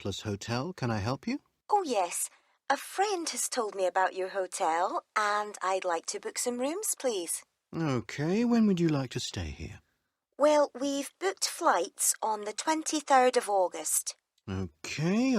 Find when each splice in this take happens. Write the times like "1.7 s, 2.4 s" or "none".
1.5 s